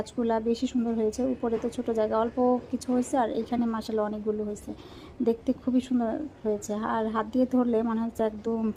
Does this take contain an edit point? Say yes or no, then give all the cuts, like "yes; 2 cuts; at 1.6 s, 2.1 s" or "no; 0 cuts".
no; 0 cuts